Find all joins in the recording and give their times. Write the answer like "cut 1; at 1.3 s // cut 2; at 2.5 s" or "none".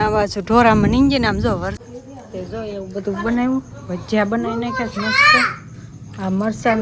cut 1; at 1.8 s